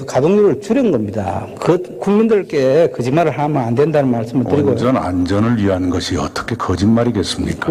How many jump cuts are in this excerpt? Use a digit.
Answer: 0